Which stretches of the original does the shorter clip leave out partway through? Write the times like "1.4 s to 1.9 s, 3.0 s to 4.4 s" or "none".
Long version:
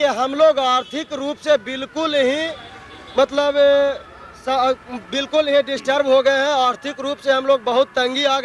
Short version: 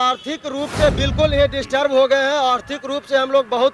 1.7 s to 5.2 s